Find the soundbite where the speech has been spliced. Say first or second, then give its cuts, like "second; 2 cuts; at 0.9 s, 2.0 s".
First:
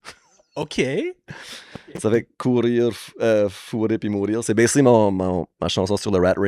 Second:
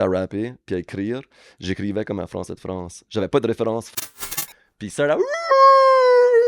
second; 1 cut; at 4.1 s